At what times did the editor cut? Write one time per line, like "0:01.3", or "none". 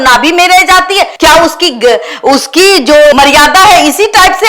none